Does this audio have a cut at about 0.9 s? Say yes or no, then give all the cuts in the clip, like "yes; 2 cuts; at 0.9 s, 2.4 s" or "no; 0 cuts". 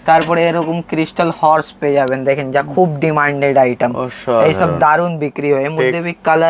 no; 0 cuts